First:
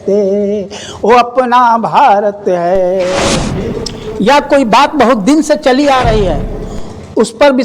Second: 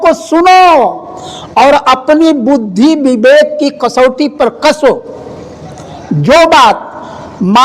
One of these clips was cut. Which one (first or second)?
first